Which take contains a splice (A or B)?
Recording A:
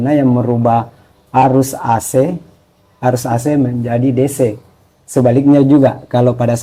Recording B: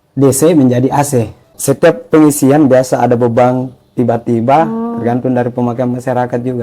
B